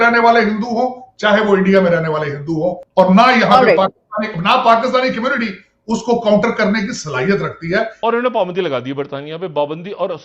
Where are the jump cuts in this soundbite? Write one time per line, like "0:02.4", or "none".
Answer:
0:02.8
0:07.9